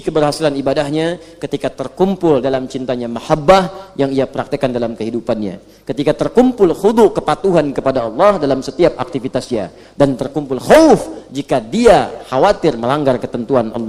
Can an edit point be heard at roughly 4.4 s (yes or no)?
no